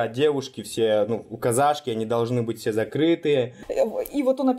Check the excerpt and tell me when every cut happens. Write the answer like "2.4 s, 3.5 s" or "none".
3.6 s